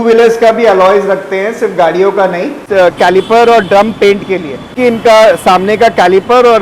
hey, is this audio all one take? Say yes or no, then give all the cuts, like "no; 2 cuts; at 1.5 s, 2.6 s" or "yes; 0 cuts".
no; 2 cuts; at 2.7 s, 4.7 s